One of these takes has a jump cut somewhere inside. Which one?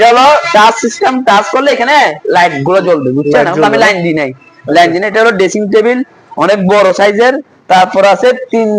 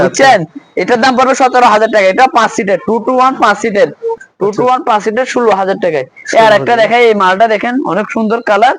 second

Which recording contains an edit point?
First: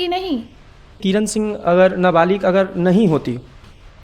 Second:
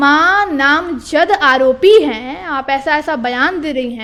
first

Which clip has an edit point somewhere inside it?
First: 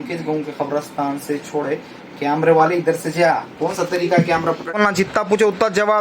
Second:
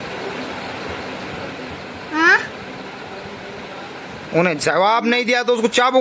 first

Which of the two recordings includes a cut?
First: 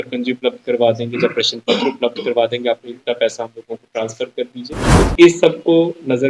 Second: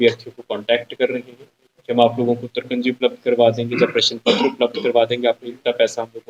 first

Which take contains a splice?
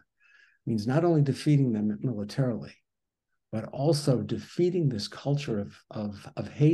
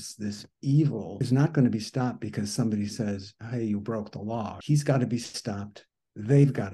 second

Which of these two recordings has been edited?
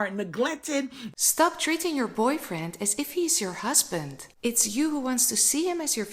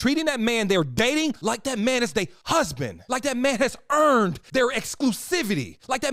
first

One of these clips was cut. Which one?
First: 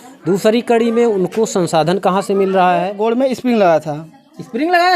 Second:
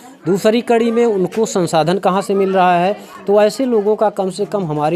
first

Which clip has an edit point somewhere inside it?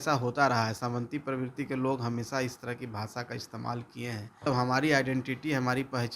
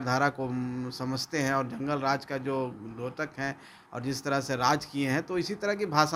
first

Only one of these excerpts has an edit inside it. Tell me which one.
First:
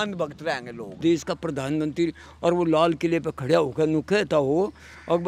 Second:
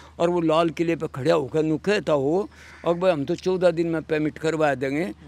first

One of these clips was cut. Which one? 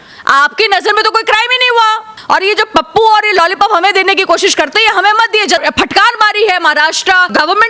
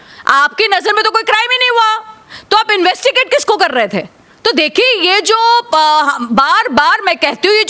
first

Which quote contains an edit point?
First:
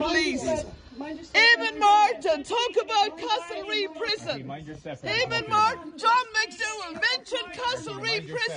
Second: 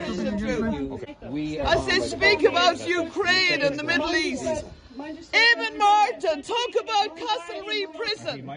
second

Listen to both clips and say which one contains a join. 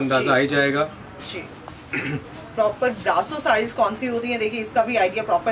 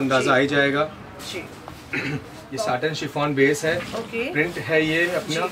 second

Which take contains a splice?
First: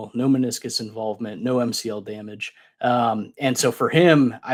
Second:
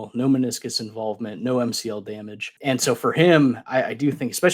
second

